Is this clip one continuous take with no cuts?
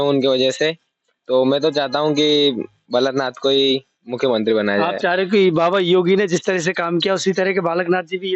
yes; 0 cuts

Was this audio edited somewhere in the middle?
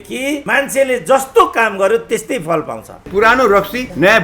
yes; 1 cut; at 3.0 s

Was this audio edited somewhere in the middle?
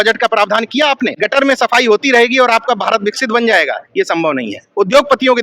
yes; 1 cut; at 1.1 s

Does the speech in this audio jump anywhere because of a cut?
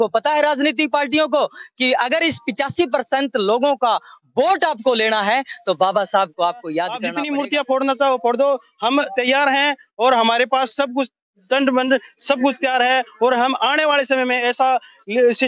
yes; 1 cut; at 7.0 s

